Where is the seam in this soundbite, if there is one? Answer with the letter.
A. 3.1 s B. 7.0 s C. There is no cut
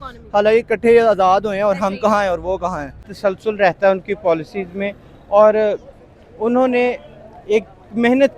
A